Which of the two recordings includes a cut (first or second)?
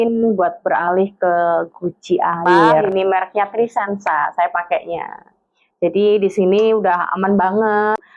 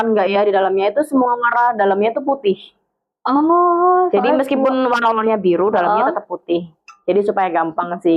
first